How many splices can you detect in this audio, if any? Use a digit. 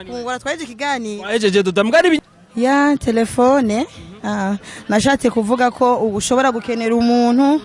1